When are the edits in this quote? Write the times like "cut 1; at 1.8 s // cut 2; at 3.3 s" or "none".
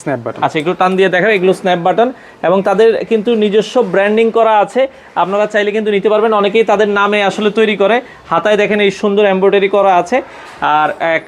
none